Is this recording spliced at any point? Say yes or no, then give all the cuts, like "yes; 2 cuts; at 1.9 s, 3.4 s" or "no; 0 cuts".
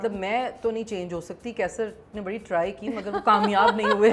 no; 0 cuts